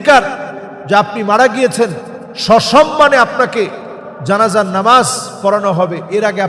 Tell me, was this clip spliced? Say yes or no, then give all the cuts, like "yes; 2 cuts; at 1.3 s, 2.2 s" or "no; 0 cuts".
no; 0 cuts